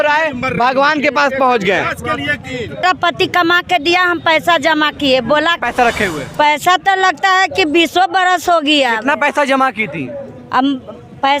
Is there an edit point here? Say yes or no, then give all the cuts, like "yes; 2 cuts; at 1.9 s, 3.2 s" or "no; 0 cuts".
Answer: yes; 2 cuts; at 2.8 s, 5.6 s